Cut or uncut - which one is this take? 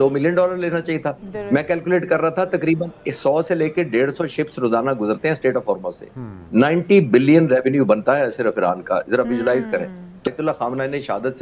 cut